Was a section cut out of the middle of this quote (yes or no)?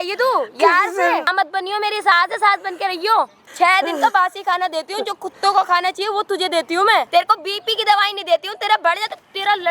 yes